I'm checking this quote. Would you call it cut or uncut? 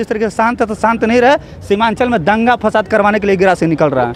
uncut